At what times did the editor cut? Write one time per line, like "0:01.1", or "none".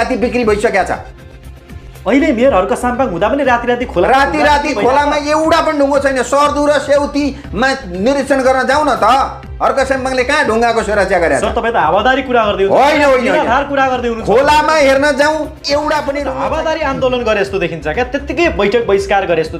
0:16.4